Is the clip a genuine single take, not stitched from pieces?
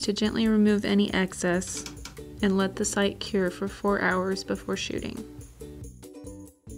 no; 1 cut; at 5.2 s

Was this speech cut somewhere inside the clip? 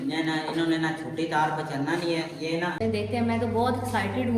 yes; 1 cut; at 2.8 s

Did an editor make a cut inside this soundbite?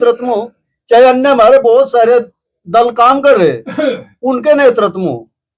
no; 0 cuts

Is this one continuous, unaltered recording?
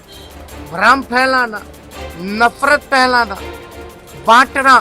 yes; 0 cuts

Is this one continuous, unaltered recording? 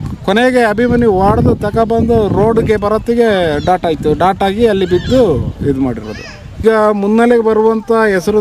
no; 1 cut; at 6.6 s

